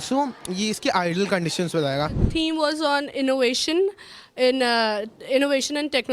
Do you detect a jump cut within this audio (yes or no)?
yes